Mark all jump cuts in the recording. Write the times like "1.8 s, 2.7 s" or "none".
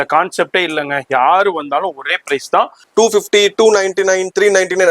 2.8 s

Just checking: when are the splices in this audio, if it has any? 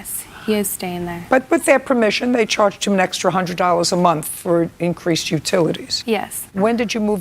1.5 s, 6.1 s

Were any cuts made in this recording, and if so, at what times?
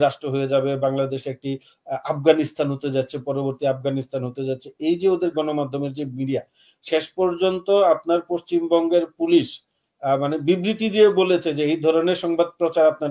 none

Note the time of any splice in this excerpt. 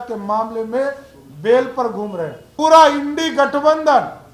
2.5 s

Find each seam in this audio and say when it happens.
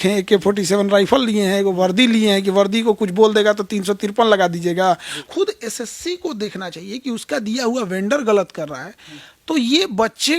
5.1 s

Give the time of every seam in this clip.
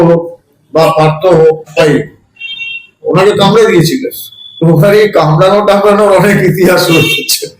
1.7 s

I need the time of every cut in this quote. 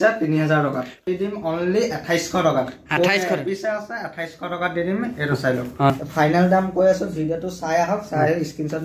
1.0 s, 5.9 s

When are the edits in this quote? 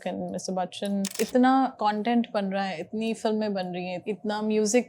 1.1 s, 1.7 s, 4.0 s

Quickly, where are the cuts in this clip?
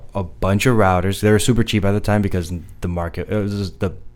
none

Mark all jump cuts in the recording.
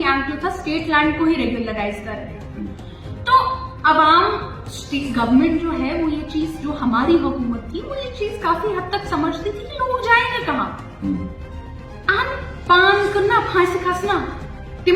none

